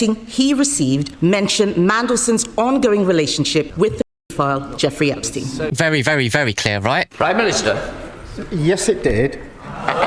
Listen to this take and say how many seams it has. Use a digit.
2